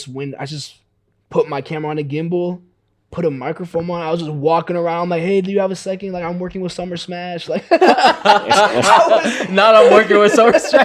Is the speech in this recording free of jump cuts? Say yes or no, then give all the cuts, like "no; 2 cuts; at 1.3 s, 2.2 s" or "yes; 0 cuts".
yes; 0 cuts